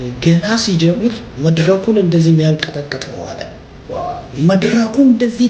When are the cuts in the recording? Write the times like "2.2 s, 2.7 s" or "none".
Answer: none